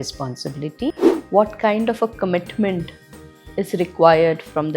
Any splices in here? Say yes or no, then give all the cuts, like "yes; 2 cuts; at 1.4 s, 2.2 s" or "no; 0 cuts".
yes; 1 cut; at 1.1 s